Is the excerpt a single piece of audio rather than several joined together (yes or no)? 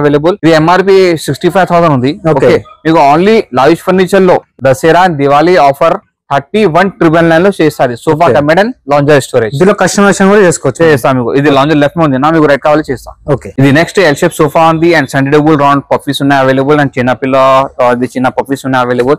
yes